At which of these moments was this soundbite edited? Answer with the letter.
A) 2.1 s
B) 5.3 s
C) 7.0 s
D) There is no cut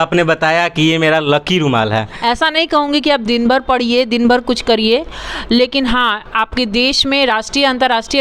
A